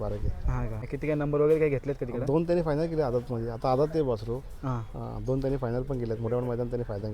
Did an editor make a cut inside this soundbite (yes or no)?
yes